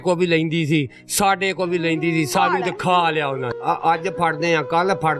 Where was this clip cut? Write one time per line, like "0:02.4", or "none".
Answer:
0:03.4